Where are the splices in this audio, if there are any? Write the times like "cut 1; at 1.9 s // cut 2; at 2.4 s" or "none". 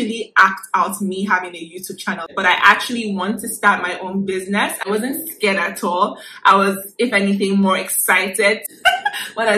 cut 1; at 2.3 s // cut 2; at 4.8 s // cut 3; at 8.7 s